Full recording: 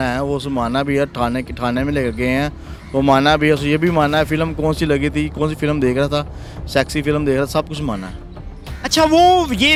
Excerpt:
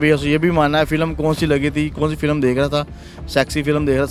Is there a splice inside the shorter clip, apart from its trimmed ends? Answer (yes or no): no